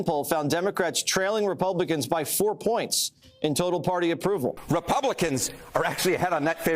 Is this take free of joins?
no; 1 cut; at 4.6 s

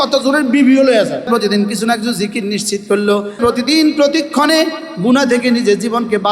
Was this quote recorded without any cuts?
no; 2 cuts; at 1.3 s, 3.4 s

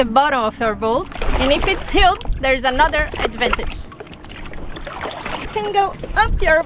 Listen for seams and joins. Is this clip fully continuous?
no; 1 cut; at 1.2 s

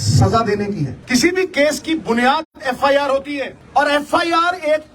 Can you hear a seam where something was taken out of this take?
yes; 2 cuts; at 1.0 s, 3.6 s

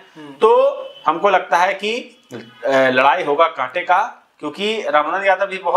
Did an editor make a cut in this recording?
no; 0 cuts

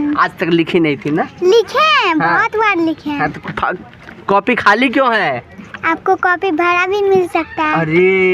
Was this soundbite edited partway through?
no; 0 cuts

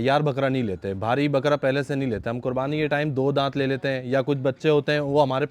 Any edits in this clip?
no; 0 cuts

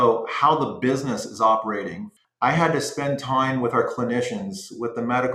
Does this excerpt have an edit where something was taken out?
yes; 1 cut; at 2.0 s

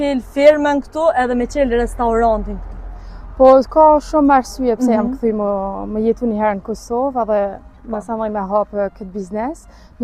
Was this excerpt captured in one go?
yes; 0 cuts

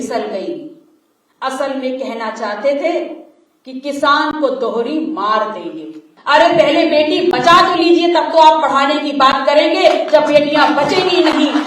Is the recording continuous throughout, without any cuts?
no; 1 cut; at 6.1 s

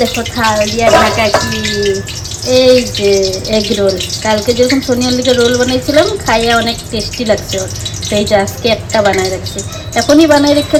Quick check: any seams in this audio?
no; 0 cuts

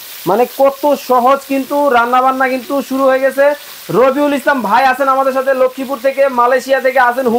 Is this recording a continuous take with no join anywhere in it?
yes; 0 cuts

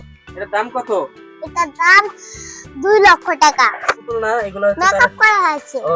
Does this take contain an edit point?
yes; 1 cut; at 3.8 s

